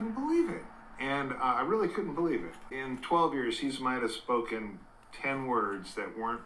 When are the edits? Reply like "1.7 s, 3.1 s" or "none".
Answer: 2.7 s